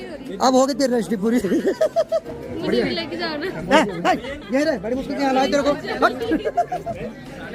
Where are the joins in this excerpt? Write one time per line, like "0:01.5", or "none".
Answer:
none